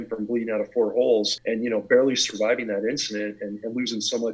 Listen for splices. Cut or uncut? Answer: cut